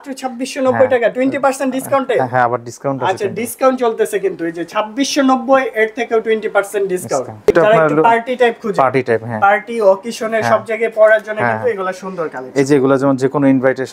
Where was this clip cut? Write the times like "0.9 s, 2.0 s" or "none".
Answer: 7.5 s